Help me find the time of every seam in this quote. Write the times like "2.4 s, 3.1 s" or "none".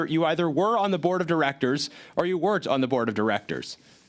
none